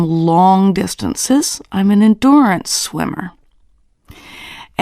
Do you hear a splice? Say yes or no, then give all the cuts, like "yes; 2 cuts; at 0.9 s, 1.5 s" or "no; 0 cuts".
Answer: yes; 1 cut; at 1.6 s